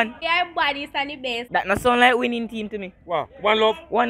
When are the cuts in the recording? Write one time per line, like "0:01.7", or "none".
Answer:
none